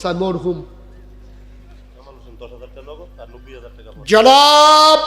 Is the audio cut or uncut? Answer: cut